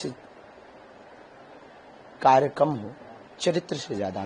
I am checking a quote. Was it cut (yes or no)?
no